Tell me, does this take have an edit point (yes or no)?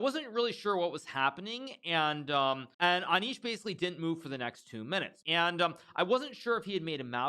yes